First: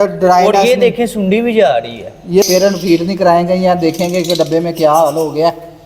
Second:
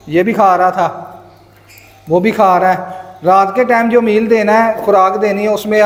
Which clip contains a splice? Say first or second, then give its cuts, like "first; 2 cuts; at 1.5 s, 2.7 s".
first; 1 cut; at 2.4 s